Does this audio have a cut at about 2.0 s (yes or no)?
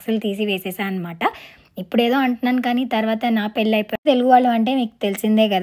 no